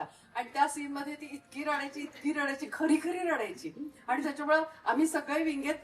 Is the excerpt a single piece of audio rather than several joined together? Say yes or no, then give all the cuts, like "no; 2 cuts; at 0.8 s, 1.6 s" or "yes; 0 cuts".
yes; 0 cuts